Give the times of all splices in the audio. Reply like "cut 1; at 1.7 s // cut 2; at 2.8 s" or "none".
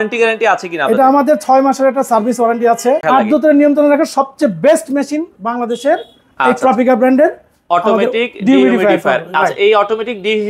cut 1; at 3.0 s